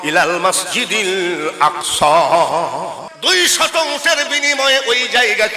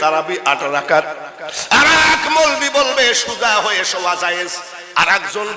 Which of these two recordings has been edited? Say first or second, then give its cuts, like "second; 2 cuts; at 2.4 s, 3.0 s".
first; 1 cut; at 3.1 s